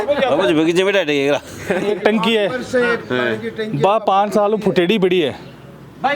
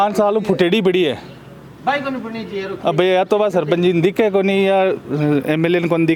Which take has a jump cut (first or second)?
first